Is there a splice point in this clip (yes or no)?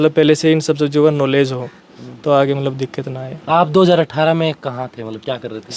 no